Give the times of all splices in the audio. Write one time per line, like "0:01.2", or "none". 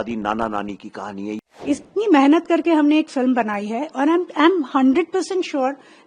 0:01.3